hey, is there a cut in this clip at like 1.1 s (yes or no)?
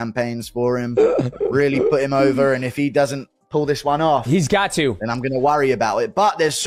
no